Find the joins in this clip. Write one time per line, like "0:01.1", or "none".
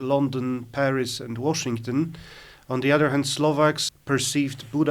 0:03.8